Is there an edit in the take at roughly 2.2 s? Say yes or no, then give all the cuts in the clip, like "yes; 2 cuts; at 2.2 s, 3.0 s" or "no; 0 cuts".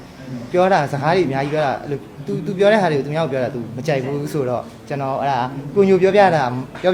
no; 0 cuts